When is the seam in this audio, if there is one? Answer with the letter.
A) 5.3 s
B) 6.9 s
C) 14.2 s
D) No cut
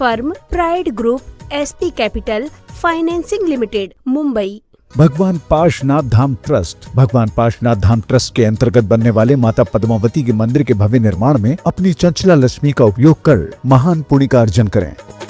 D